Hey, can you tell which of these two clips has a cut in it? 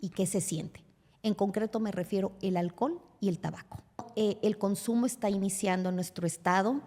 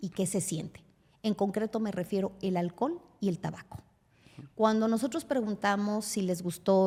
first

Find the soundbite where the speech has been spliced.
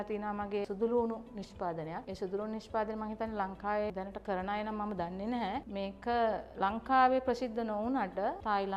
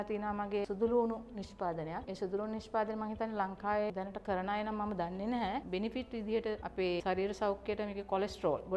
second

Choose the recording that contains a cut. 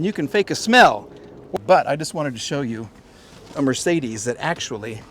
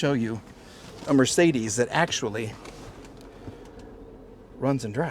first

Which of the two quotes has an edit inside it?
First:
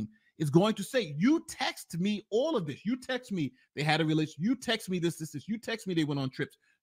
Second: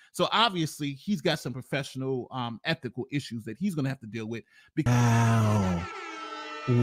second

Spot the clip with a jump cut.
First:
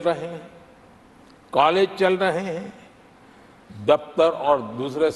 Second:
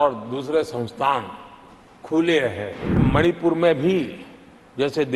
second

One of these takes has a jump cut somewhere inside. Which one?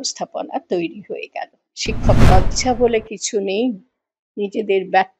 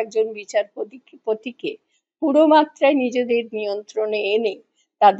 first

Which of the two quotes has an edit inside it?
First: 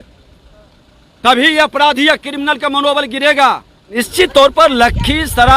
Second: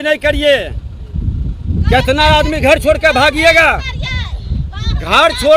first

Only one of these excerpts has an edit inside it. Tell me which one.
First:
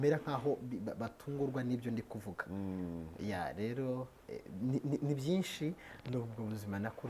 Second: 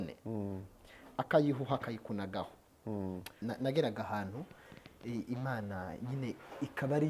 second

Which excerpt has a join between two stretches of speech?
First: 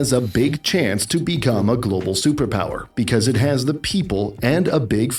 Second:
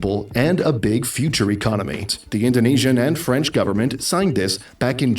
second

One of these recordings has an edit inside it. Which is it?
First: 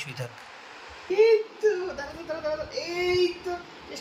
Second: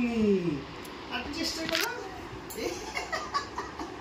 first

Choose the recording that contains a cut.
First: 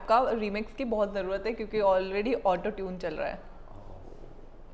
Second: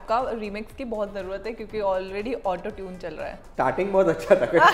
second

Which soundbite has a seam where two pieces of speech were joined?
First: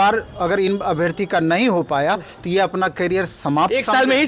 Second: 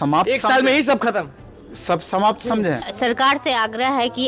second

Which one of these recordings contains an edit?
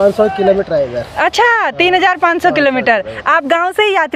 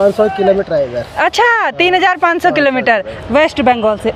second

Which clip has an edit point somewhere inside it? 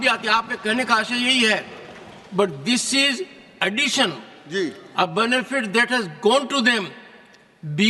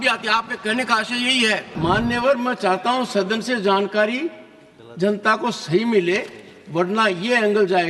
second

